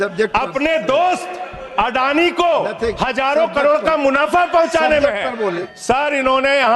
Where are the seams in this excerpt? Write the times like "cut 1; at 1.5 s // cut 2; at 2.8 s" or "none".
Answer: cut 1; at 5.6 s